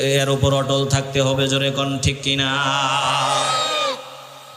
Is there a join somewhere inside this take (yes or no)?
no